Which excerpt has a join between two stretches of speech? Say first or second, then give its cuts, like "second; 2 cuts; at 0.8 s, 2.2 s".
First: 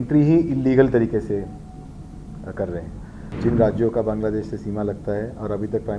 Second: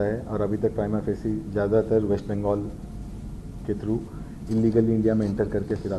first; 1 cut; at 3.3 s